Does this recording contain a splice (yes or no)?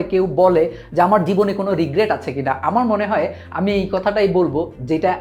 no